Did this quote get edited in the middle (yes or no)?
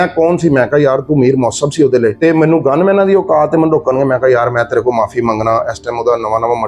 yes